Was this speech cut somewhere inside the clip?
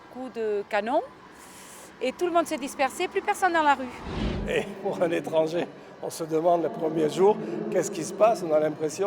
yes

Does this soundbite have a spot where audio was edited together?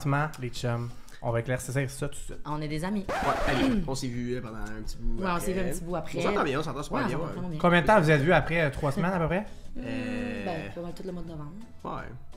no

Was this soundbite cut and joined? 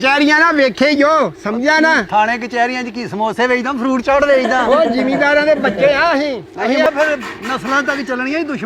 yes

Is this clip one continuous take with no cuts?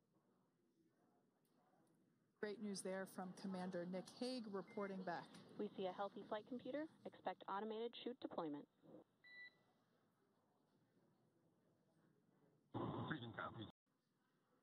no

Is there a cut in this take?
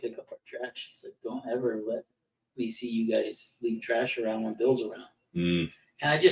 no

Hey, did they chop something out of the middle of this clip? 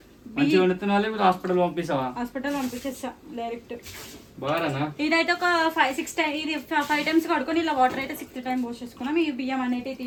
no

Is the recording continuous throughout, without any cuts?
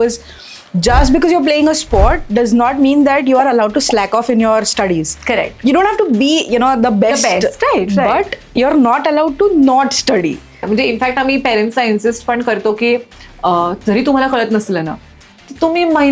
no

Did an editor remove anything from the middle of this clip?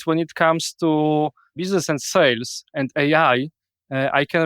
yes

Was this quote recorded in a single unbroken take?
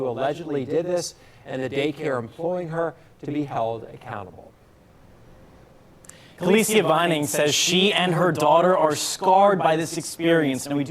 no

